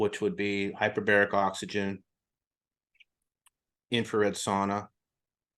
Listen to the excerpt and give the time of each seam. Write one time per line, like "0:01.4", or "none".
none